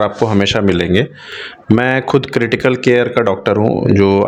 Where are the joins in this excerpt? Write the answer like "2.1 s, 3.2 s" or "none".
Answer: none